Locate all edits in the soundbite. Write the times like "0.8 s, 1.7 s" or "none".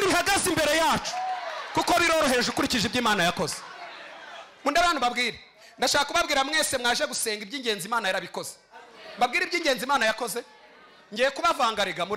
none